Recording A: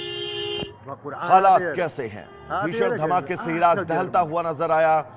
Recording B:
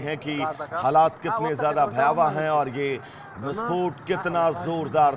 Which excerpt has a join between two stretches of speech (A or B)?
A